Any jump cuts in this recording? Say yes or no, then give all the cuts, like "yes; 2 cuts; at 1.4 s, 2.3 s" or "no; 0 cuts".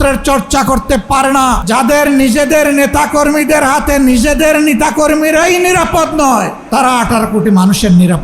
yes; 2 cuts; at 1.6 s, 6.6 s